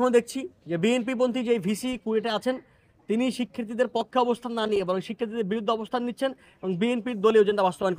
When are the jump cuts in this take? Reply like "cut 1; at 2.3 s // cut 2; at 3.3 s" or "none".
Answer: none